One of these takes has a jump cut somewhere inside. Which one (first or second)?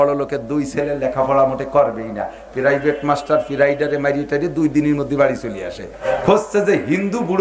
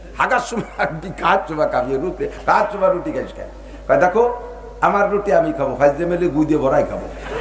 first